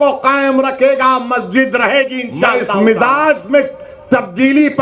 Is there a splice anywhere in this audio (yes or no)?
yes